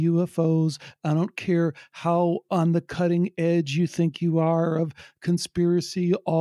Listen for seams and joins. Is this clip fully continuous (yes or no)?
yes